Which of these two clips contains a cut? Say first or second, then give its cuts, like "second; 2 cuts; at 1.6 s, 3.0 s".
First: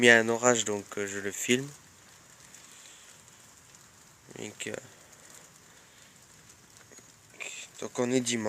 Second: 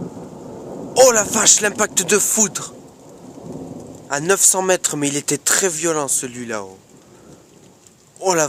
first; 1 cut; at 3.1 s